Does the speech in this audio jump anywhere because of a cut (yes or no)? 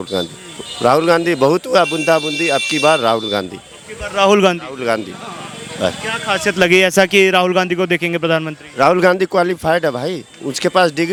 no